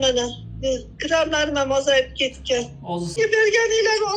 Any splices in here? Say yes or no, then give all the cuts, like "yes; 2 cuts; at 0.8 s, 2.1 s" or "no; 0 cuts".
yes; 1 cut; at 3.2 s